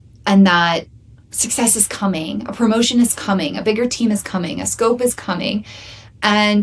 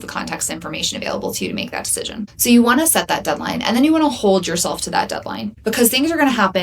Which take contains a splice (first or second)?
second